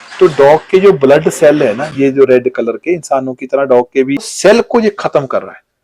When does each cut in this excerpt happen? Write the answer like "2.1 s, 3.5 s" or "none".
4.3 s